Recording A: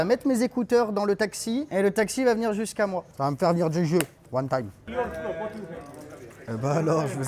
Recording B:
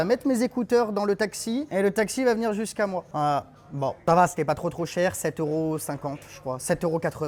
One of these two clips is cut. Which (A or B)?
A